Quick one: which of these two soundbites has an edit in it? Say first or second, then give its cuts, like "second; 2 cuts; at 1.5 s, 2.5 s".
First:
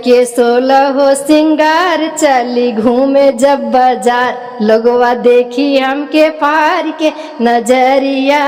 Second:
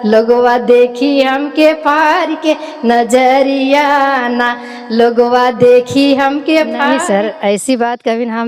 second; 1 cut; at 6.9 s